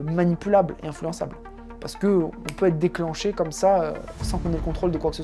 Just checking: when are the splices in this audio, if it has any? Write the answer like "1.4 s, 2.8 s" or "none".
none